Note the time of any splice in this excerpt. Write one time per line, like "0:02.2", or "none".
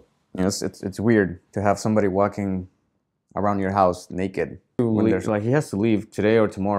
0:04.8